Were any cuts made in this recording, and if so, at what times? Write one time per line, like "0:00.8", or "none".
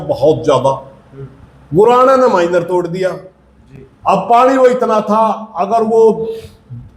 none